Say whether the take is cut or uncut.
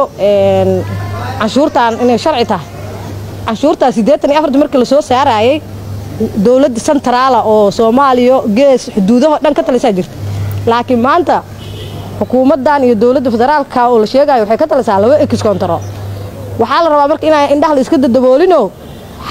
uncut